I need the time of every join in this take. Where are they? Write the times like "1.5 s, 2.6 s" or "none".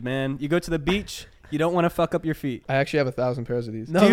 2.6 s